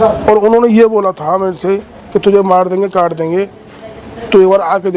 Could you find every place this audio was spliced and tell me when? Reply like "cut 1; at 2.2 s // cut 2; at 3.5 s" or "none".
none